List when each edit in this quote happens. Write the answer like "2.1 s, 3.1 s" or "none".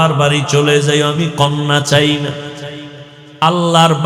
none